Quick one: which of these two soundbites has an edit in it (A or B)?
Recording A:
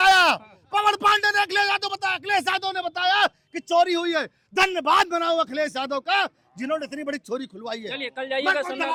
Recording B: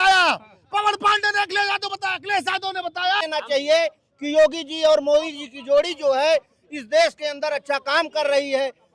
B